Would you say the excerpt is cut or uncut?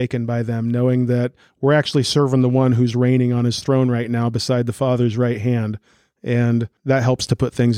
cut